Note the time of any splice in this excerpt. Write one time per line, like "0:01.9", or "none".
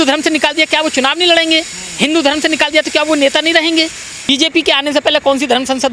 0:04.3